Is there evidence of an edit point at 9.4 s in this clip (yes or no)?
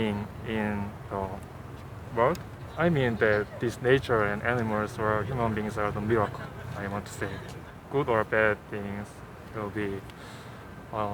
no